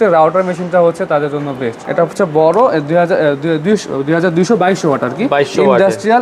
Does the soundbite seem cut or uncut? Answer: cut